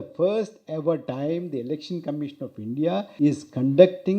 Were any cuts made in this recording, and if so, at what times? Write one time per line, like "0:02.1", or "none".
0:01.1
0:03.1